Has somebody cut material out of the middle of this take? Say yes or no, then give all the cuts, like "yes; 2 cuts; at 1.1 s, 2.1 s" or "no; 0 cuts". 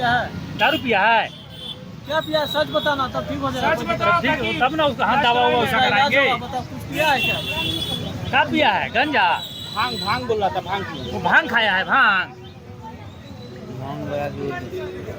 no; 0 cuts